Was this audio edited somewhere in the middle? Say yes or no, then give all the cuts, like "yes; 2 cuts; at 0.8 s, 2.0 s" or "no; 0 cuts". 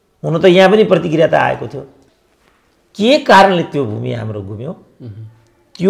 yes; 1 cut; at 2.0 s